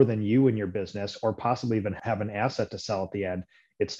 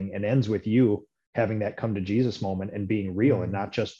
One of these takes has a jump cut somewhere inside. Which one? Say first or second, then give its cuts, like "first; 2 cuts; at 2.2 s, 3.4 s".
first; 1 cut; at 2.0 s